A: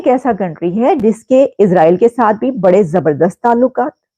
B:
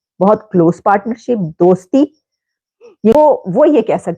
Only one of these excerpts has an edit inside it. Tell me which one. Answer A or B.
B